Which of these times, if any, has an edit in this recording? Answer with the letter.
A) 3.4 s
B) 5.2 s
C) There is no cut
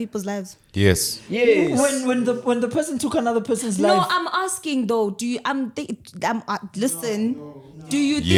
C